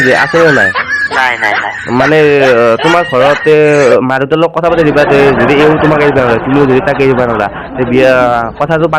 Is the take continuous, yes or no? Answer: yes